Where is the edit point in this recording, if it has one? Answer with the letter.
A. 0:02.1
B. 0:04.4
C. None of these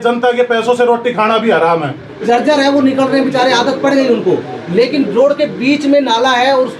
A